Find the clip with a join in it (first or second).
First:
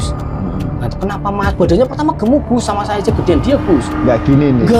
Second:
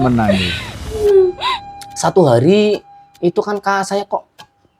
second